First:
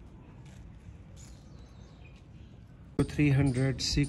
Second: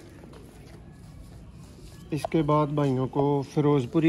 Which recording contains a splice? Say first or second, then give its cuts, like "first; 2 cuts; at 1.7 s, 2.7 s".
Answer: first; 1 cut; at 3.0 s